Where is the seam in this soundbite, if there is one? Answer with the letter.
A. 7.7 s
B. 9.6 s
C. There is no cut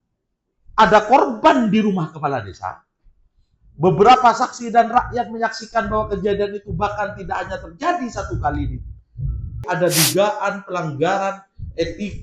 B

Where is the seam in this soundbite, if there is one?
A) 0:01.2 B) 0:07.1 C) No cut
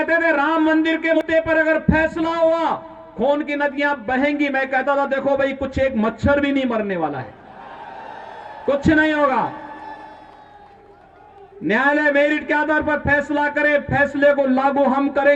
A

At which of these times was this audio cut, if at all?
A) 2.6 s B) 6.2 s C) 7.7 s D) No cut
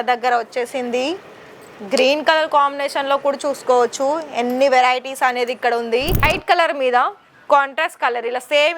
B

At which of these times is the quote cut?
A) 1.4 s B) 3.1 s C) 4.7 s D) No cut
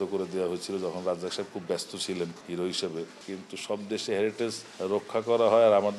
B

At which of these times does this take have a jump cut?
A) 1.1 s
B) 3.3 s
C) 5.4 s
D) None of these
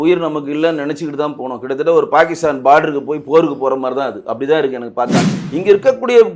C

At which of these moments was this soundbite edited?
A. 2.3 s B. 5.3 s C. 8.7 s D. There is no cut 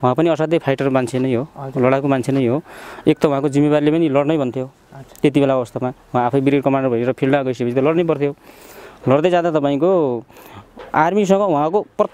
D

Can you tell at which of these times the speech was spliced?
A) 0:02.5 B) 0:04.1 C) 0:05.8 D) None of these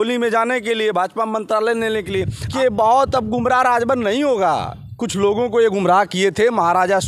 A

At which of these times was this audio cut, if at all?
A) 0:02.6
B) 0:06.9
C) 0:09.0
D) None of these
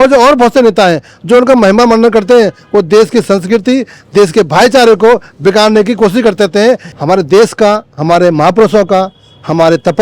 B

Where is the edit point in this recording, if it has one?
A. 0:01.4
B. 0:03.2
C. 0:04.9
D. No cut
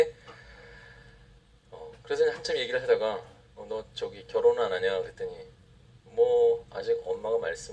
C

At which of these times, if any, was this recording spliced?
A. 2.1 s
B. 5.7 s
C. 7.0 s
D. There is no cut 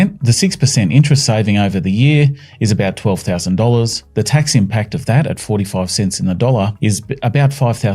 D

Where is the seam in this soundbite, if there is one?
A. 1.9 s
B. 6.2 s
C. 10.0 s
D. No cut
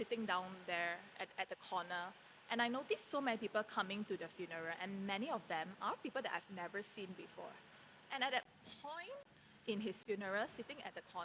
C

